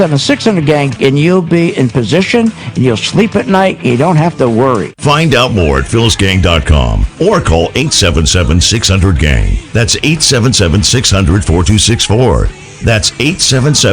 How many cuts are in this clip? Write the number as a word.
one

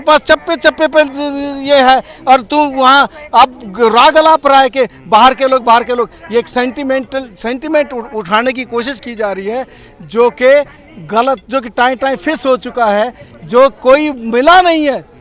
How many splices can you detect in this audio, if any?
zero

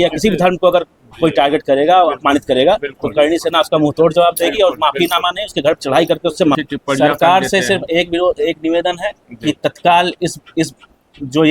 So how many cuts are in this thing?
one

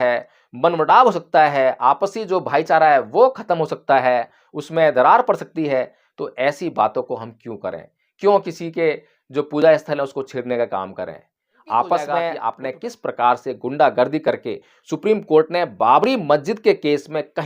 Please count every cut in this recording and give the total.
one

